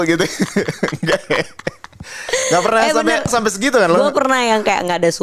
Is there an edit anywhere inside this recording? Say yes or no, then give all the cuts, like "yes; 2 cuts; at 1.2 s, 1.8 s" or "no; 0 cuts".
no; 0 cuts